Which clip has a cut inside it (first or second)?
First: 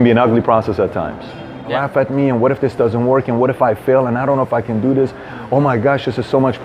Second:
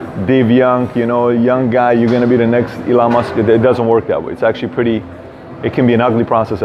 first